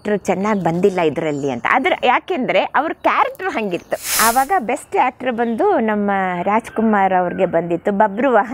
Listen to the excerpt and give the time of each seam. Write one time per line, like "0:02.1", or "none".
0:04.2